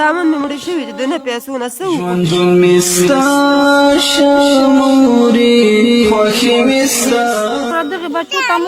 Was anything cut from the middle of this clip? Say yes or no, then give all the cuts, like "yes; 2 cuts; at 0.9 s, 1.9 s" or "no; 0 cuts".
yes; 2 cuts; at 2.1 s, 7.7 s